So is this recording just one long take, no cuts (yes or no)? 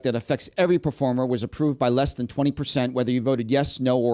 yes